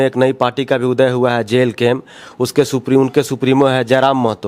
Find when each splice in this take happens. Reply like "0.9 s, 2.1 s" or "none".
none